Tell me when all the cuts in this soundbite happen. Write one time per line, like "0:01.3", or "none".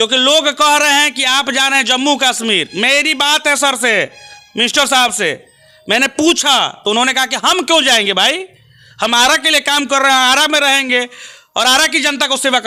none